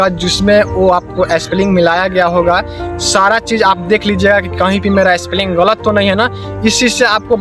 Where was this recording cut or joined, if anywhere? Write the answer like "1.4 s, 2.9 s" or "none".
none

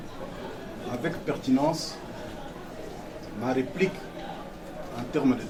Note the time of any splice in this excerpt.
none

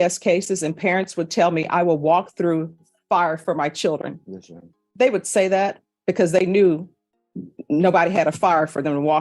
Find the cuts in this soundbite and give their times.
none

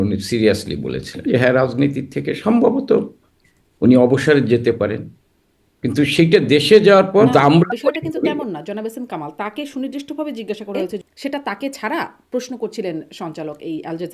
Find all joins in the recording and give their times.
1.1 s, 7.3 s, 11.0 s

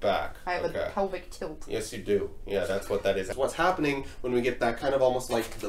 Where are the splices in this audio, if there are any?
3.3 s

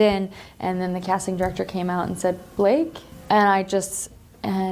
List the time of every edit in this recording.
3.1 s

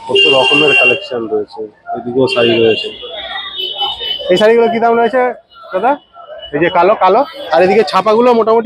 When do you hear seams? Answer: 7.5 s

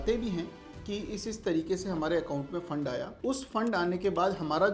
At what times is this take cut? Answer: 3.1 s

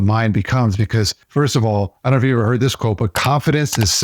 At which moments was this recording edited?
none

